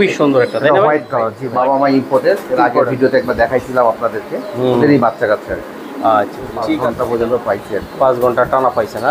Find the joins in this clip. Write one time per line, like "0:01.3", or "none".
0:01.4
0:06.8